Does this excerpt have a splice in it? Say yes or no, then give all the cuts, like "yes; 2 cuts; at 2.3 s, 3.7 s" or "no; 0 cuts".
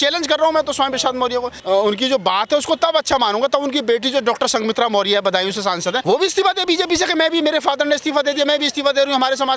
yes; 2 cuts; at 1.6 s, 6.0 s